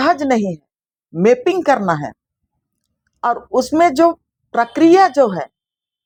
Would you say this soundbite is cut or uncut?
uncut